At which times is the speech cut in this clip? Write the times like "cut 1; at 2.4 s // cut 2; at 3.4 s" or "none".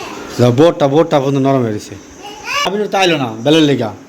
cut 1; at 2.7 s